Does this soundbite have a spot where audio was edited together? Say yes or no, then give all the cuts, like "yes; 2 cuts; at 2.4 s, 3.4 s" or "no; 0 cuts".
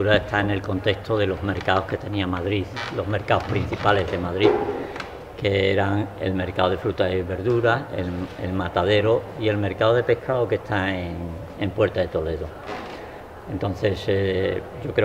yes; 1 cut; at 14.1 s